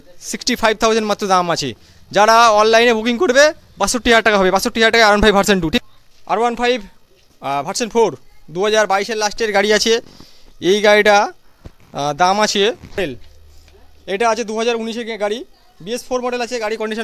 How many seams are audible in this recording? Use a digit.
2